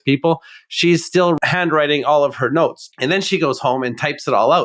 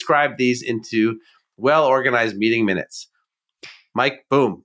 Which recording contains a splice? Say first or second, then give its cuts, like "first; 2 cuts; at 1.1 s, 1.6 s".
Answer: first; 2 cuts; at 1.4 s, 2.9 s